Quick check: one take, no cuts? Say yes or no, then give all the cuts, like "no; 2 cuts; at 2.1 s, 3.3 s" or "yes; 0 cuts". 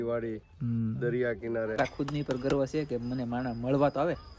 no; 1 cut; at 1.8 s